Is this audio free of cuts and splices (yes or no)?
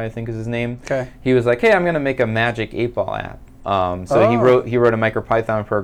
yes